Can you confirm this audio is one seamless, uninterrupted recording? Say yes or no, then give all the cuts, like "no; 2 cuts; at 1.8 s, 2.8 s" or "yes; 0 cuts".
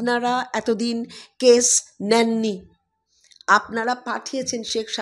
yes; 0 cuts